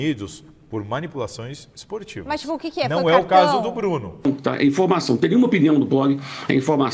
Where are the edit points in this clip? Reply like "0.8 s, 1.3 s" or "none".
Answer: 4.2 s